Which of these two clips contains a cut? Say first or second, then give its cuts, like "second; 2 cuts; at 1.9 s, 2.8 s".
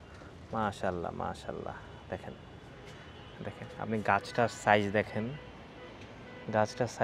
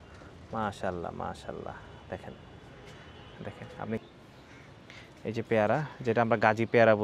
second; 1 cut; at 4.0 s